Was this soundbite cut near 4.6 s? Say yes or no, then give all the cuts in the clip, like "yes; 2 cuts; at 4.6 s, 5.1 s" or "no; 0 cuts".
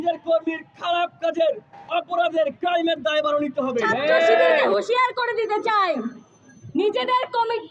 yes; 1 cut; at 4.6 s